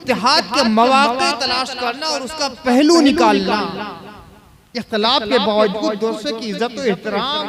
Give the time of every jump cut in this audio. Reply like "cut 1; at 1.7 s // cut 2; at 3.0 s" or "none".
none